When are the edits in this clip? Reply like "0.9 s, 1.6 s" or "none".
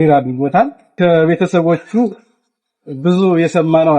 1.0 s